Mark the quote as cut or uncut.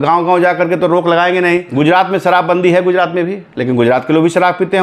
cut